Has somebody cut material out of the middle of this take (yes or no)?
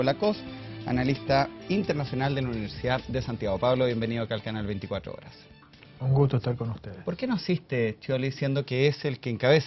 yes